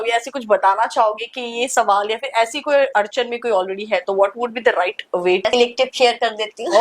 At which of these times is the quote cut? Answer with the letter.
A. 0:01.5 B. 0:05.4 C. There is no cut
B